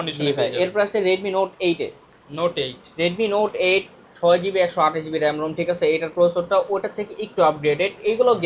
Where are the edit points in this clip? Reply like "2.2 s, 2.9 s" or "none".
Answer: none

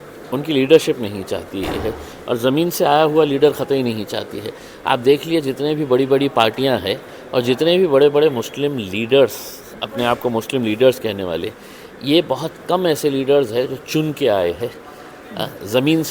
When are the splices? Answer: none

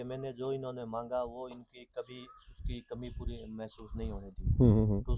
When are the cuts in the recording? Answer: none

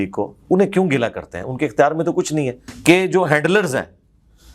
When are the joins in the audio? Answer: 2.7 s

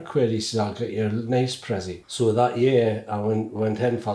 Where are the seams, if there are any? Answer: 2.0 s

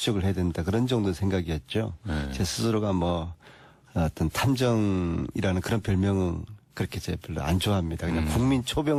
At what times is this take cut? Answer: none

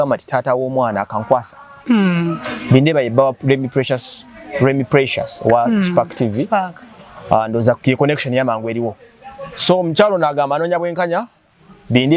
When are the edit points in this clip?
none

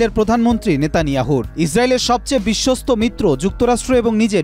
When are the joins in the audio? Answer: none

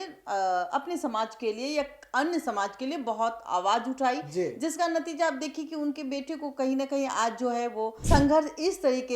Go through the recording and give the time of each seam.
7.9 s

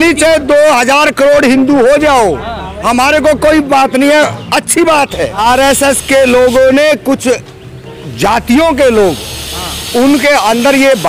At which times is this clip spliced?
5.4 s

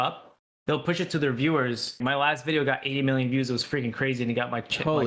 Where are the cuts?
1.9 s

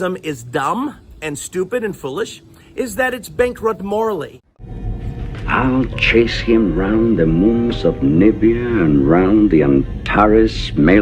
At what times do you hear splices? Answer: 4.5 s

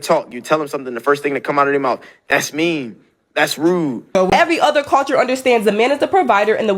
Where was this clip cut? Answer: 4.1 s

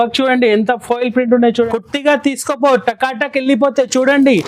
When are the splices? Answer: 1.7 s

